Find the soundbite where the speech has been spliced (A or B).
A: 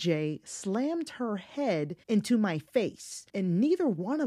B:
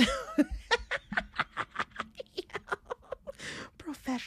A